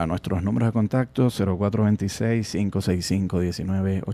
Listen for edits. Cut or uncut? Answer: uncut